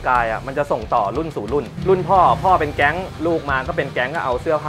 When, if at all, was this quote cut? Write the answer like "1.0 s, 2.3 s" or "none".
none

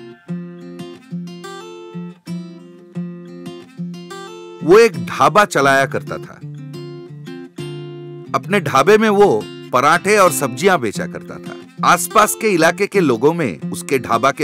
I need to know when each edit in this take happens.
4.6 s

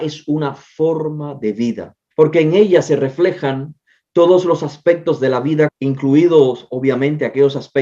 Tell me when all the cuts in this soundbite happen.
1.9 s, 5.7 s

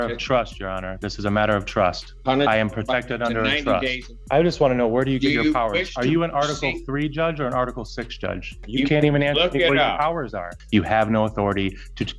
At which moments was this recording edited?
4.1 s, 8.6 s, 10.5 s

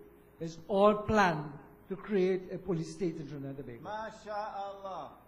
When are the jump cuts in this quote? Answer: 3.8 s

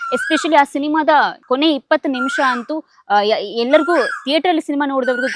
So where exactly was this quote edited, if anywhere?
none

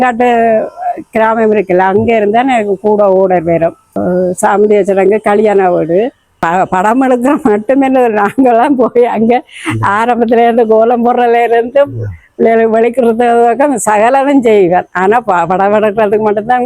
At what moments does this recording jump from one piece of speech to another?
4.0 s, 6.4 s

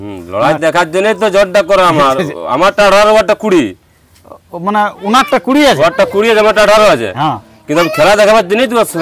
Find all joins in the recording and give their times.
none

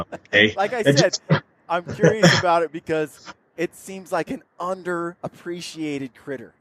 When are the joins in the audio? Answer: none

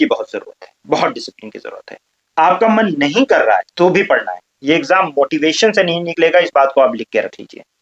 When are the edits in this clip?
none

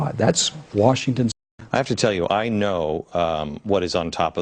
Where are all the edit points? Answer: none

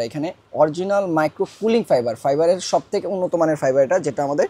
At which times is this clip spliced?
none

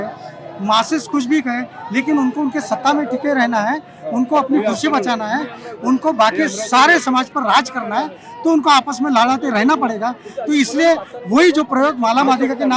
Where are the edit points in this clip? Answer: none

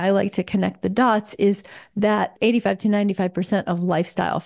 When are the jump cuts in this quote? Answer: 2.3 s

